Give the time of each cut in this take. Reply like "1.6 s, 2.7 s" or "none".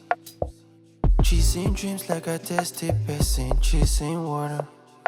2.9 s